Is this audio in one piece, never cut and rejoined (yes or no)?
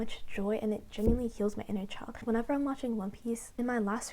yes